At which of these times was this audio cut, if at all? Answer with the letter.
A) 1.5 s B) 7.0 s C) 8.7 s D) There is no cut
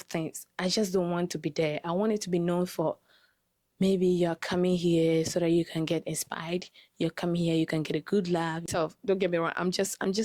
C